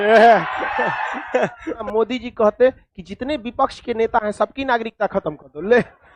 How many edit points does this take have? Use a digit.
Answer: 1